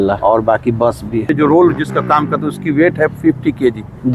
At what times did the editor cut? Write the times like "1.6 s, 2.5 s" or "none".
1.3 s